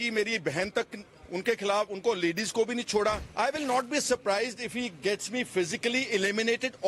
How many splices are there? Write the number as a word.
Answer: one